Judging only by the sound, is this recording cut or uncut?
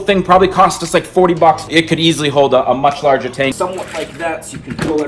cut